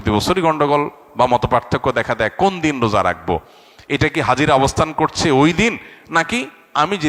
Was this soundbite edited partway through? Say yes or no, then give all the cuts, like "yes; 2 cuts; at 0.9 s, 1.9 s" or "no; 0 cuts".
no; 0 cuts